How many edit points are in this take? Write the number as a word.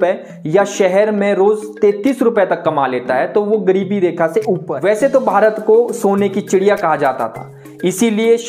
one